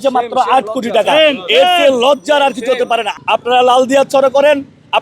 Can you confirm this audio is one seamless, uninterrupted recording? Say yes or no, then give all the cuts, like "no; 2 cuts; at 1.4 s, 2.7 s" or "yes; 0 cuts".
no; 1 cut; at 3.1 s